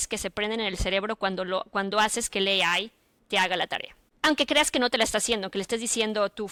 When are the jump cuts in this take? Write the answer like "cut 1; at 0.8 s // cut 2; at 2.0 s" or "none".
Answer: none